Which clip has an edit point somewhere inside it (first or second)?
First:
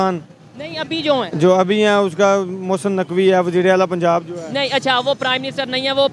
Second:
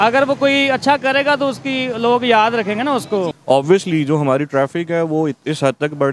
second